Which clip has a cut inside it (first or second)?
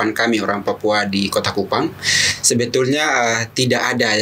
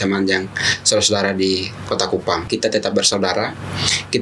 second